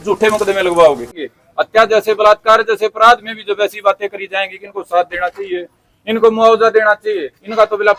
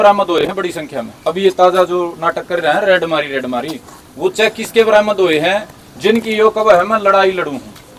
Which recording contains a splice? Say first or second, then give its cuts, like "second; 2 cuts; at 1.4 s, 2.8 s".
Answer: first; 1 cut; at 1.2 s